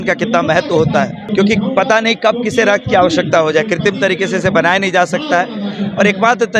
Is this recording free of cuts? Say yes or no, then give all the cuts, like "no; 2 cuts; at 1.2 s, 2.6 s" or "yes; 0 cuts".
no; 1 cut; at 1.3 s